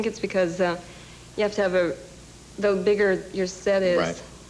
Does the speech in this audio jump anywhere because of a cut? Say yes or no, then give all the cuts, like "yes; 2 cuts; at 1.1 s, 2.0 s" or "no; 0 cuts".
no; 0 cuts